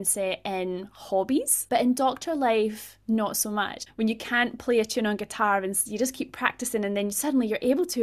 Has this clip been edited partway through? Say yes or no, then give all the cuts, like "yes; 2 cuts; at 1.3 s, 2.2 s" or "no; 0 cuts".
yes; 2 cuts; at 1.6 s, 3.8 s